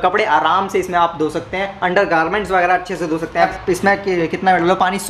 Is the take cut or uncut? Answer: cut